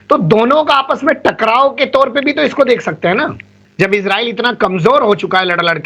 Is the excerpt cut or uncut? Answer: cut